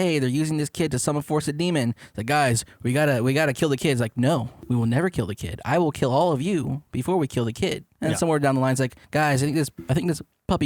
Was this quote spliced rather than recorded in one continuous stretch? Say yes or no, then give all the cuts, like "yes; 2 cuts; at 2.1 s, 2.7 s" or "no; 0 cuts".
yes; 3 cuts; at 4.5 s, 7.9 s, 9.0 s